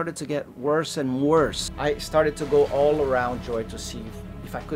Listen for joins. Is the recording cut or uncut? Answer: cut